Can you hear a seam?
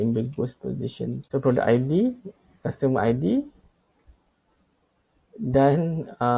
yes; 1 cut; at 1.2 s

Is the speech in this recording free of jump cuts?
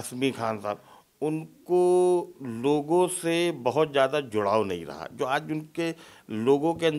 yes; 0 cuts

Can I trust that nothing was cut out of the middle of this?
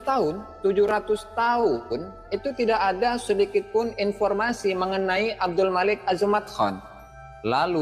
yes; 0 cuts

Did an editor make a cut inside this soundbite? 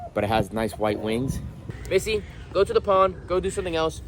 yes; 1 cut; at 1.7 s

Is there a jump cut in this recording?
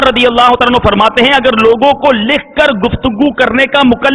no; 0 cuts

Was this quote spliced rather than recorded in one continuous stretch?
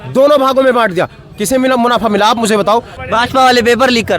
yes; 1 cut; at 3.0 s

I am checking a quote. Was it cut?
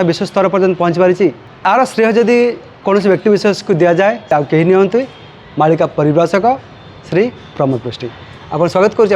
yes; 3 cuts; at 1.5 s, 2.7 s, 4.3 s

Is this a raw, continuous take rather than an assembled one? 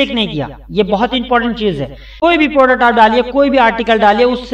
no; 1 cut; at 2.0 s

